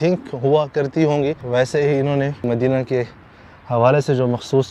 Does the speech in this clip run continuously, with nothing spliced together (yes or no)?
no